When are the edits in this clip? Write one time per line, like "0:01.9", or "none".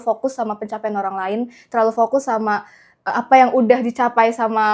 none